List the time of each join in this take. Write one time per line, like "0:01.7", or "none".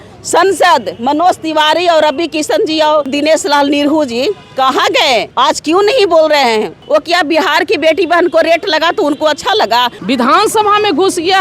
0:03.1
0:05.3
0:06.8
0:09.9